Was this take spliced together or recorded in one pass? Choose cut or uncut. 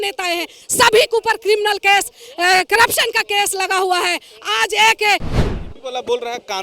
cut